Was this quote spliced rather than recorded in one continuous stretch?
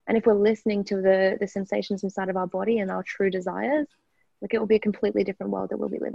no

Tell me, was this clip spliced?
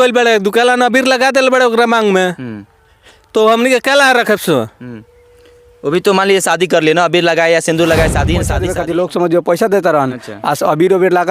yes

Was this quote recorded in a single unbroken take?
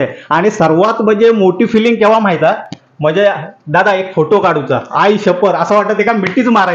yes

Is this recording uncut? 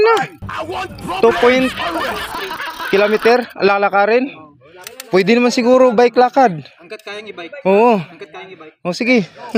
yes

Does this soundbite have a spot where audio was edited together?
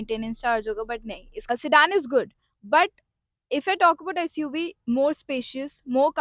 yes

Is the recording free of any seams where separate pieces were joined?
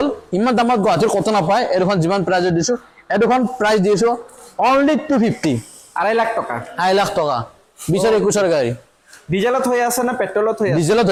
yes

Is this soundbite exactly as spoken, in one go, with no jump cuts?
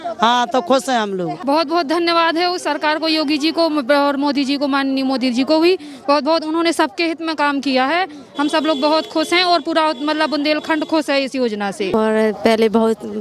no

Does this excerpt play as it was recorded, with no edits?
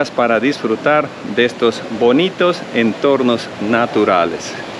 yes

